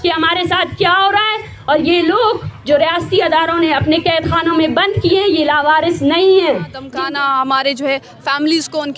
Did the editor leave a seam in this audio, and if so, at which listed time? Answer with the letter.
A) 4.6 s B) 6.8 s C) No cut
B